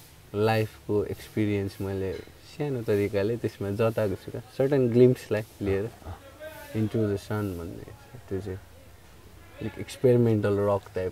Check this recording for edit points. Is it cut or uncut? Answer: uncut